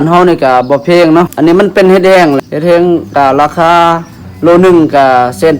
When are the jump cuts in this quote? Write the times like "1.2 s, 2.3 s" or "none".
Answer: 1.3 s, 2.4 s